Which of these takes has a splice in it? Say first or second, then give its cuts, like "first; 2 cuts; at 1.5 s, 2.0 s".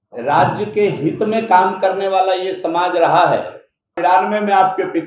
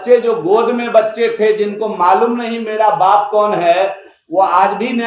first; 1 cut; at 4.0 s